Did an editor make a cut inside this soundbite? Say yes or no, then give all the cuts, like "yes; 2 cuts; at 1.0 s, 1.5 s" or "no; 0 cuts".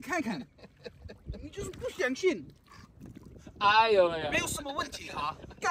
no; 0 cuts